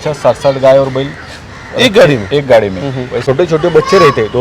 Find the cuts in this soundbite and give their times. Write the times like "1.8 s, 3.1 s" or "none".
3.2 s